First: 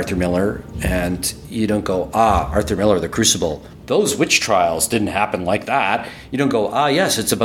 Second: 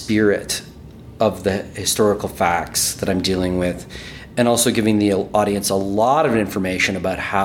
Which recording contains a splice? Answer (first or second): first